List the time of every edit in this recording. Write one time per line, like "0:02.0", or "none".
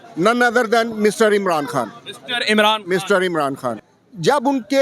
0:03.9